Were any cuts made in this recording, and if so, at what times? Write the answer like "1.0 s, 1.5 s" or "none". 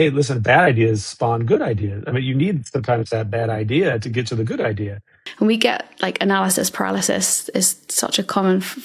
5.2 s

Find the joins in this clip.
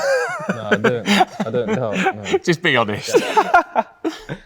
3.0 s

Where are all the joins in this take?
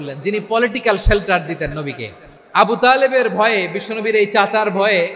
none

